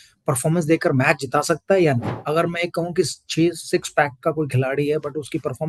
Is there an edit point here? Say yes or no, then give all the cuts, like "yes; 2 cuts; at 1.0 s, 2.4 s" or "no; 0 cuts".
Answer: yes; 1 cut; at 2.1 s